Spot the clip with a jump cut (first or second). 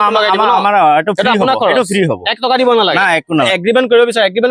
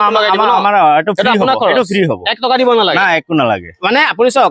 first